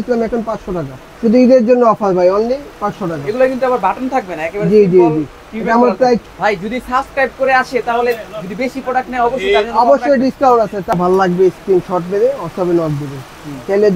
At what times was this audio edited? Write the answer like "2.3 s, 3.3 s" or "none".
1.0 s, 6.2 s, 10.9 s